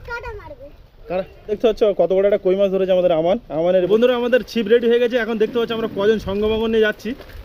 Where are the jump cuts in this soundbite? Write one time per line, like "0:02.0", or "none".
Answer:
0:01.6
0:03.9